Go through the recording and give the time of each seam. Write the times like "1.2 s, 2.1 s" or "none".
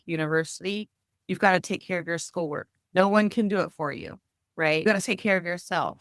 2.7 s, 4.9 s